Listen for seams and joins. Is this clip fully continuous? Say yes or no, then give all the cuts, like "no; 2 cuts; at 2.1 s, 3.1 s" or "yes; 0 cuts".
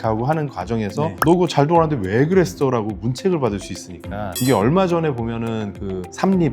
no; 1 cut; at 4.3 s